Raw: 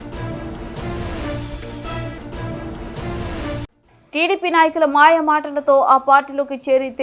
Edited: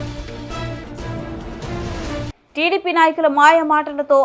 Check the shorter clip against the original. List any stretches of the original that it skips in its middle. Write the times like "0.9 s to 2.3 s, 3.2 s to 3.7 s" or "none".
3.7 s to 4.0 s